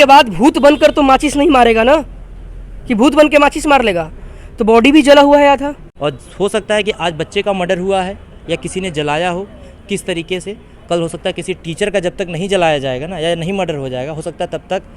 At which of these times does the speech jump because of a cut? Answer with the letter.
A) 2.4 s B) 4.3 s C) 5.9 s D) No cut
C